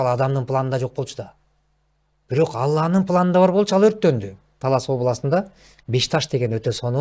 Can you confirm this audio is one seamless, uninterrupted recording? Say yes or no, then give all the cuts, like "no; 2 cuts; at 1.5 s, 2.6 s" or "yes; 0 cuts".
no; 1 cut; at 4.5 s